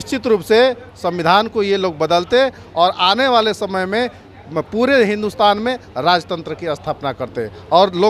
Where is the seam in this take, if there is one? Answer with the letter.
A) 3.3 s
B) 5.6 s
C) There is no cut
C